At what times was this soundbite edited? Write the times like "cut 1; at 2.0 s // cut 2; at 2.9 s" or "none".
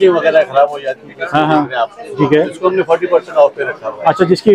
none